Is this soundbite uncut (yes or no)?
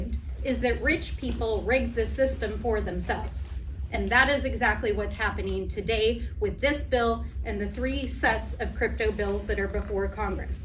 yes